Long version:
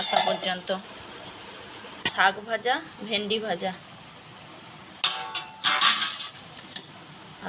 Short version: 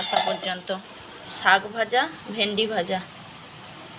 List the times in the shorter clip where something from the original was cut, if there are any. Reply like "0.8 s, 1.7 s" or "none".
1.2 s